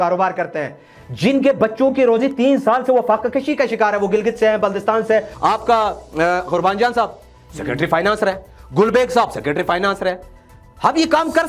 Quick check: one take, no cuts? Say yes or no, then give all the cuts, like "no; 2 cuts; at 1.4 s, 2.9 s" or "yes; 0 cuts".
no; 1 cut; at 5.3 s